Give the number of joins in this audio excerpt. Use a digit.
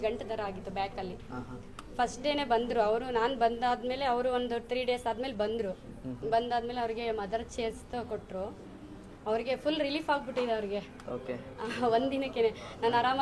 0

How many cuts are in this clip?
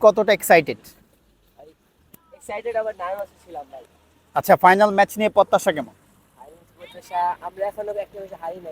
0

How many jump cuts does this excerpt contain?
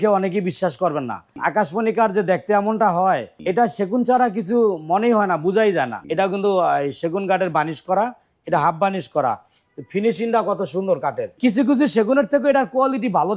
4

